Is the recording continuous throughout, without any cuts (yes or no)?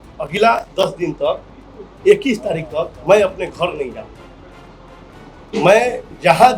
yes